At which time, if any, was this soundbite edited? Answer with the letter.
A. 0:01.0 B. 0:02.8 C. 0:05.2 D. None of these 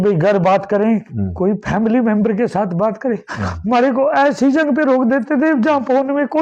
D